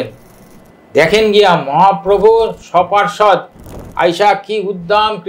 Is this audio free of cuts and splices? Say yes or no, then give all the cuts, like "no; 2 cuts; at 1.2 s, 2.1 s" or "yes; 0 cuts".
yes; 0 cuts